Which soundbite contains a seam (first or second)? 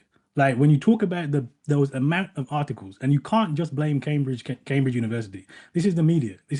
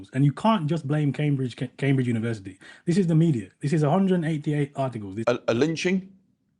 second